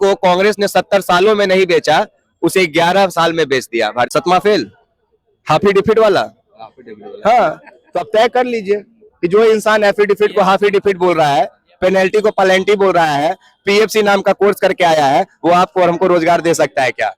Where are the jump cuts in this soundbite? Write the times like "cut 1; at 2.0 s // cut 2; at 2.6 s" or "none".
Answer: cut 1; at 4.1 s